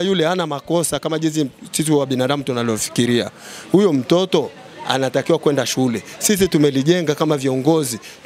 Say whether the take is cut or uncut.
uncut